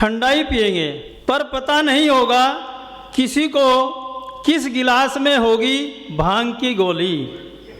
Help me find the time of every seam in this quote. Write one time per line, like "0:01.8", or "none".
0:01.1